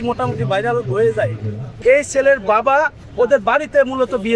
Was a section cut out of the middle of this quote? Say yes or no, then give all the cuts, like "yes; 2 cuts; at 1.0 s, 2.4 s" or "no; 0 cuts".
yes; 1 cut; at 1.8 s